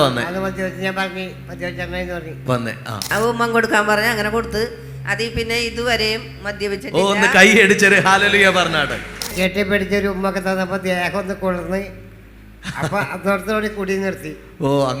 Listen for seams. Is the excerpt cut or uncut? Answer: cut